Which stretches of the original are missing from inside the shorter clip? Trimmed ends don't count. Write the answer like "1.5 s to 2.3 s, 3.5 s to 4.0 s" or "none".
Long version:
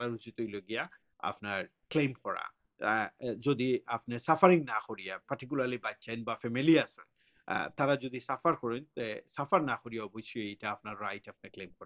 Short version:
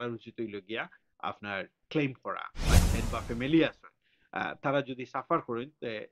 2.7 s to 5.9 s